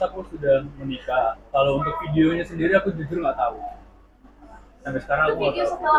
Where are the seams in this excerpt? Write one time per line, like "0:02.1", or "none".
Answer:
none